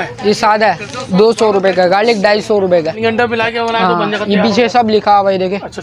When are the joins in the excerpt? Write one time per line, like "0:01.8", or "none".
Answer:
0:03.0